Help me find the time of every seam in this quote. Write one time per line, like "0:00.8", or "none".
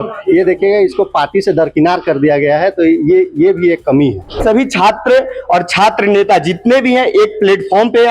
0:04.4